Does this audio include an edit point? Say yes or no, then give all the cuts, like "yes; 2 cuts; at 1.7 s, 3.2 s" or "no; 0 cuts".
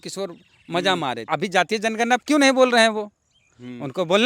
yes; 1 cut; at 1.3 s